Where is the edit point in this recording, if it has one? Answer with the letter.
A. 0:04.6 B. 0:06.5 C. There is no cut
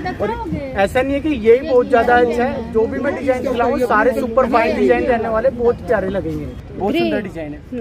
B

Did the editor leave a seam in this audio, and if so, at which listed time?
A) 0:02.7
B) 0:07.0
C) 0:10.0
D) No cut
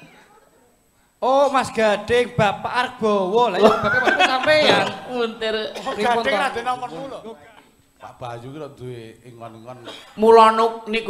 B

